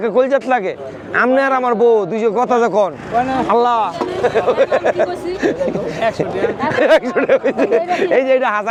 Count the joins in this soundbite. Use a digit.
0